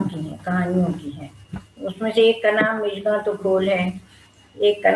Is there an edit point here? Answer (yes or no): no